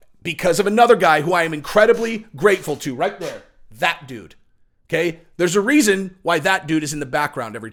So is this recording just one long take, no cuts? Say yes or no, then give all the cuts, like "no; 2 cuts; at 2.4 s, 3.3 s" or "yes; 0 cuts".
yes; 0 cuts